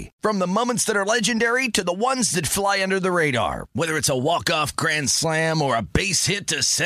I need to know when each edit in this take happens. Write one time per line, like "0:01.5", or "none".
0:03.6

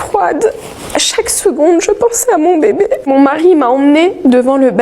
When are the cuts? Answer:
0:03.1

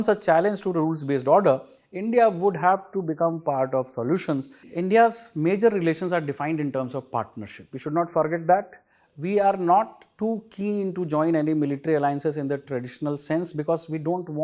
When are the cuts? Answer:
0:04.7

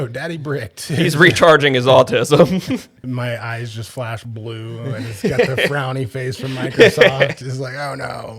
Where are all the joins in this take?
0:03.0

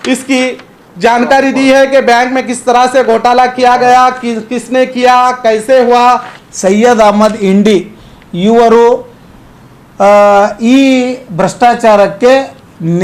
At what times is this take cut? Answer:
0:06.3

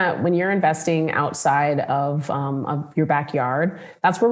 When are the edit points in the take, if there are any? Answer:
none

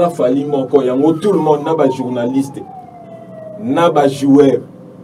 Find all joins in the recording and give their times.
none

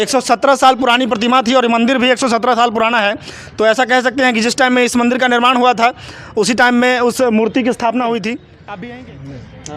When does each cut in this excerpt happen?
0:08.8

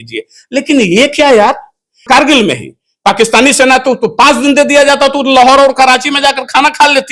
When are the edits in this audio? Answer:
0:02.0

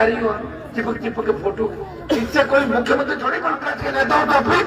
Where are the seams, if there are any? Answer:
0:03.6

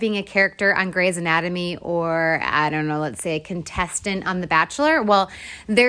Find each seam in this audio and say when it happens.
none

